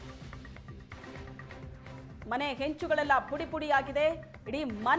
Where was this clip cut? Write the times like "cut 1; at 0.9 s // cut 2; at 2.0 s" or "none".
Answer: none